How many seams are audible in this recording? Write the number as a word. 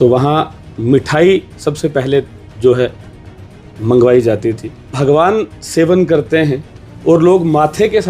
one